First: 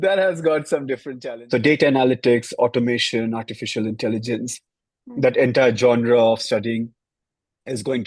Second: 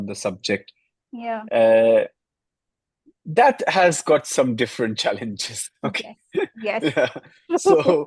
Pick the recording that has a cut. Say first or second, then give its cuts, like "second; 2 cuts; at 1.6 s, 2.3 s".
first; 1 cut; at 1.1 s